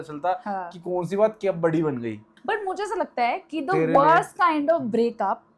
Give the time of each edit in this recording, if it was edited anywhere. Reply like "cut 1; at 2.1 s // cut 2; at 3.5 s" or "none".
cut 1; at 2.3 s